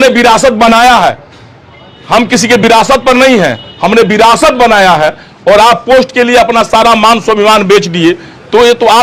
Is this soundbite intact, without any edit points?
yes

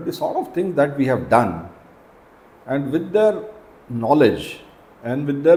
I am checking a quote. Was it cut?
no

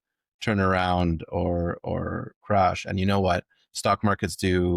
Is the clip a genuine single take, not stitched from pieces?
yes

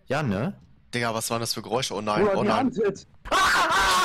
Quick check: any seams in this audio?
yes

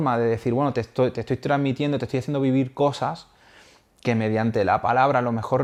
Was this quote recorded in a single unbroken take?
yes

